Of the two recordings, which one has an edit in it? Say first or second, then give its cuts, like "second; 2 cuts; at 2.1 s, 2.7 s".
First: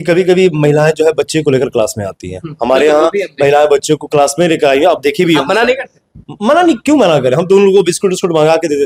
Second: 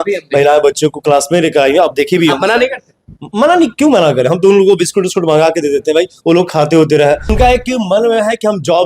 second; 1 cut; at 7.3 s